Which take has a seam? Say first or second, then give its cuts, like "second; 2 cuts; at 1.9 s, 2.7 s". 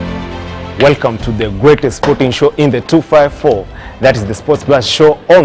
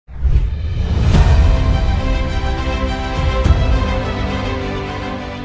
second; 1 cut; at 1.2 s